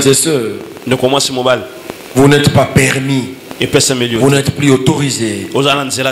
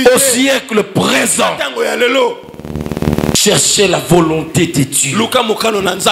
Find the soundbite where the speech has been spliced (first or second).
second